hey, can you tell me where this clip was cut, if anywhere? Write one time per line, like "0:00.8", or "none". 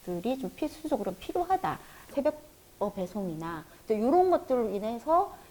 0:02.1
0:03.7